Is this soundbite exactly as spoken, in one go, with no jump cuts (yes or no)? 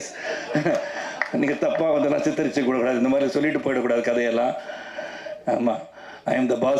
yes